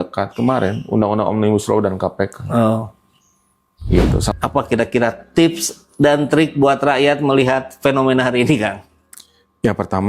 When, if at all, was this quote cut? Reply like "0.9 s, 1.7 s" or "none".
4.3 s